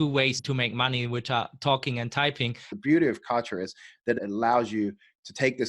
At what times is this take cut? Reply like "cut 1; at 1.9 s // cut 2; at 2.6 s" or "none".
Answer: cut 1; at 2.7 s // cut 2; at 4.2 s